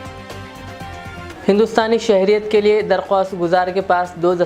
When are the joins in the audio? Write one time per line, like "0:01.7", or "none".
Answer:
none